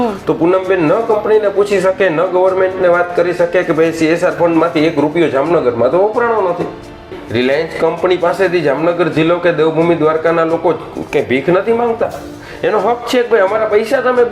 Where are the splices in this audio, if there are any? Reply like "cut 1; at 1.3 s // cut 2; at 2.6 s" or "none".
cut 1; at 7.2 s

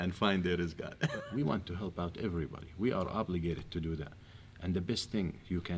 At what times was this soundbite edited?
cut 1; at 1.2 s

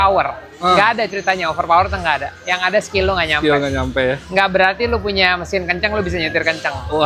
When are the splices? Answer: none

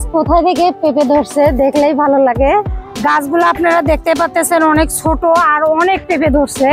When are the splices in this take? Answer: cut 1; at 2.8 s

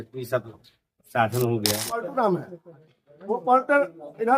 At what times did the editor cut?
cut 1; at 1.9 s

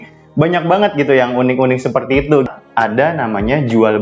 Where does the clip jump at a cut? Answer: cut 1; at 2.5 s

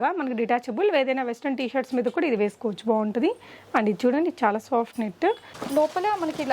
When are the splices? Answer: cut 1; at 5.6 s

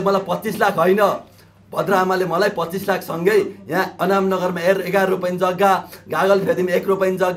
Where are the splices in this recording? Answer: none

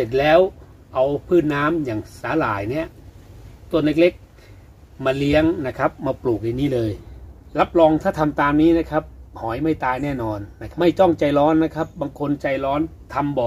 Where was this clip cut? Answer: cut 1; at 7.1 s // cut 2; at 10.6 s

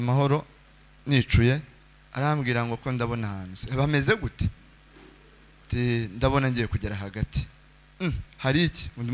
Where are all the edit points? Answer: cut 1; at 1.8 s

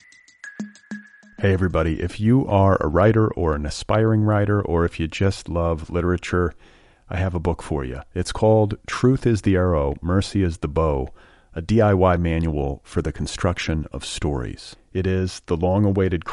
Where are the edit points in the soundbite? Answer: cut 1; at 0.9 s

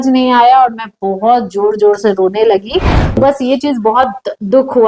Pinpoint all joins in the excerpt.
cut 1; at 3.2 s

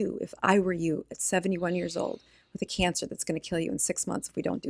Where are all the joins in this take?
none

